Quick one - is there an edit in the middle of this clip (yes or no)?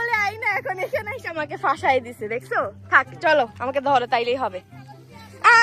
no